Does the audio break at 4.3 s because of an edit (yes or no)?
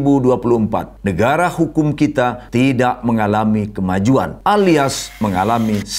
yes